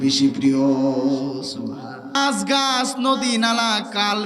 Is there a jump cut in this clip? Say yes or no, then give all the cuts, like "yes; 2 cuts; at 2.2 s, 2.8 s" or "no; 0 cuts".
yes; 1 cut; at 2.1 s